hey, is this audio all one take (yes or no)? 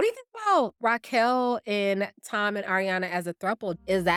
yes